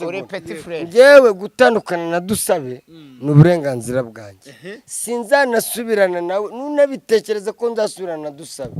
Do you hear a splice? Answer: no; 0 cuts

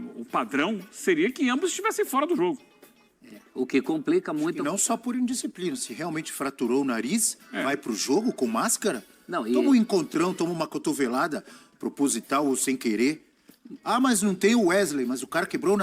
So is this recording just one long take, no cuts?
yes; 0 cuts

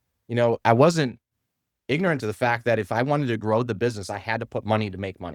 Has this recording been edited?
no; 0 cuts

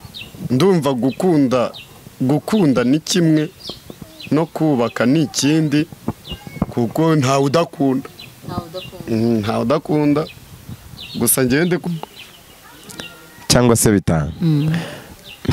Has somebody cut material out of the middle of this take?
yes; 1 cut; at 11.8 s

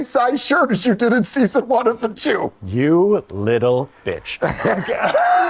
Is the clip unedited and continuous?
yes; 0 cuts

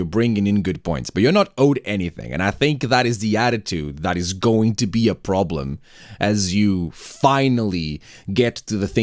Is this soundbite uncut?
yes; 0 cuts

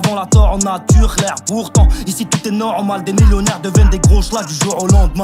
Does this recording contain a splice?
no; 0 cuts

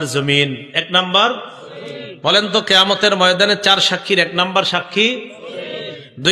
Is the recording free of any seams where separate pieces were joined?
yes; 0 cuts

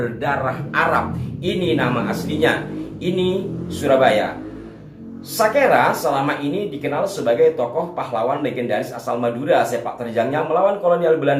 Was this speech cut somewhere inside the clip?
no; 0 cuts

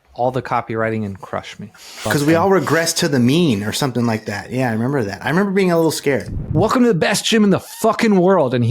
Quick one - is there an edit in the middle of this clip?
yes; 2 cuts; at 2.0 s, 6.4 s

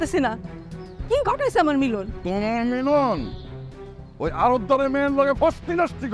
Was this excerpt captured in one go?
yes; 0 cuts

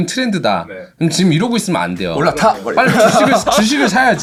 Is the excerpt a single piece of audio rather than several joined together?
yes; 0 cuts

